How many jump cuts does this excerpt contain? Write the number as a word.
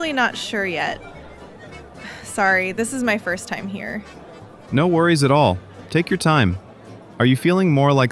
one